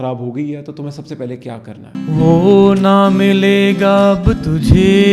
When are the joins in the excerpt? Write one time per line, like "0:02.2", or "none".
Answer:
0:01.9